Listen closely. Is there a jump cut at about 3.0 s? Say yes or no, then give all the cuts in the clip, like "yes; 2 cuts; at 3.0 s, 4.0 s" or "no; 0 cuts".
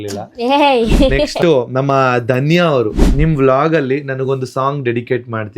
yes; 2 cuts; at 1.3 s, 3.0 s